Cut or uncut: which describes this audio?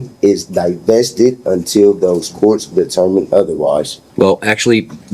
cut